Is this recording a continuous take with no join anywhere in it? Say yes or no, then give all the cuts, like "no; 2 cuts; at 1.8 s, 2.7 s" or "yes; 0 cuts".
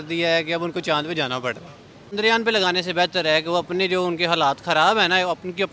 no; 1 cut; at 2.2 s